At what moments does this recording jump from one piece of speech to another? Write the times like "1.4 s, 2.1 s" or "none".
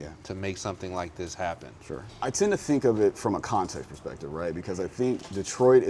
2.1 s

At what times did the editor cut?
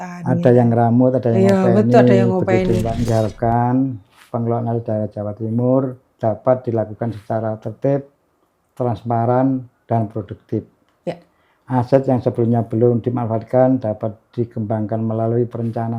3.1 s

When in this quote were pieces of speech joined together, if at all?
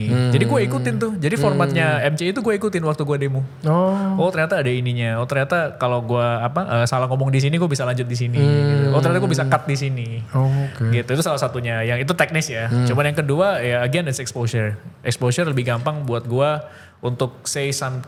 none

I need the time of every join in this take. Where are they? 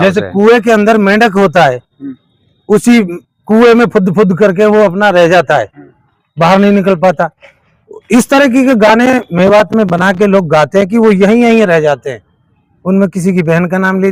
none

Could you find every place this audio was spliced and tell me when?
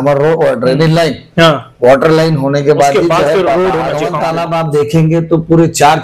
4.1 s

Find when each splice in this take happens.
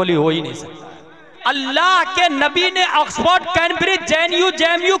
1.3 s

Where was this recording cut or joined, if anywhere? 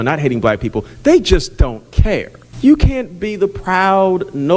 2.4 s

